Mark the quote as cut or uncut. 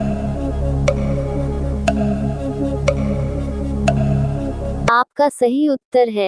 cut